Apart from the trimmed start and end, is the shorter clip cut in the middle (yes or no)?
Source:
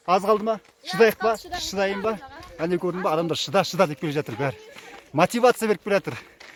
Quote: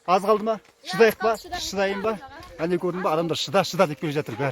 no